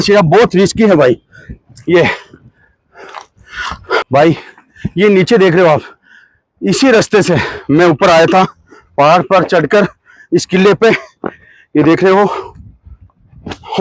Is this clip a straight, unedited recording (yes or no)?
no